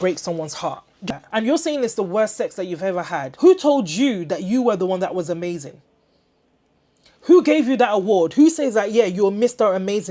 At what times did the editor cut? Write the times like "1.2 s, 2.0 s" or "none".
1.1 s